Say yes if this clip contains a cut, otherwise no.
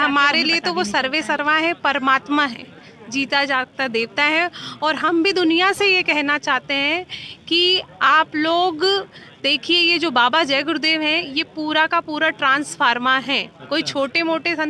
no